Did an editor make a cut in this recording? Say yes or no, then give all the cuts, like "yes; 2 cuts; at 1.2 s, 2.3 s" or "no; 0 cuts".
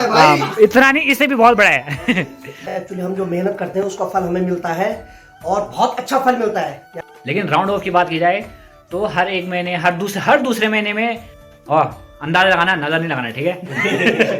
yes; 3 cuts; at 2.5 s, 6.9 s, 11.7 s